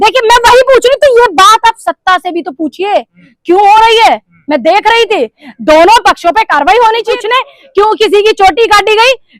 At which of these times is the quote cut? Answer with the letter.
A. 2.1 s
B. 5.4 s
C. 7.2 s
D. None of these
C